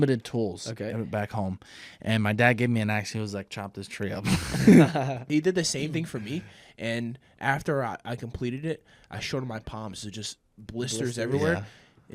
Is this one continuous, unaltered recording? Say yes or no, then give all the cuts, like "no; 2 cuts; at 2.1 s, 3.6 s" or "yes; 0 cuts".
no; 1 cut; at 5.3 s